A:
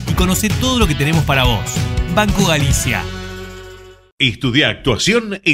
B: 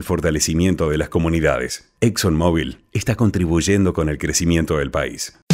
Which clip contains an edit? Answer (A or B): A